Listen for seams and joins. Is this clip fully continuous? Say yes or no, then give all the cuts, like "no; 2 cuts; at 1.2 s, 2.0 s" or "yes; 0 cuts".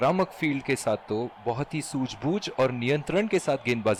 yes; 0 cuts